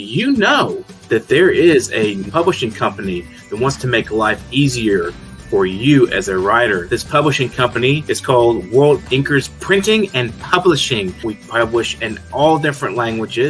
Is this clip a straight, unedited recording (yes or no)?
no